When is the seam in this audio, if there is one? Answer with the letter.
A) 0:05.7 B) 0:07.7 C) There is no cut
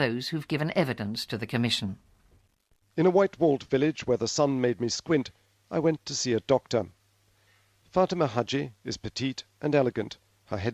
A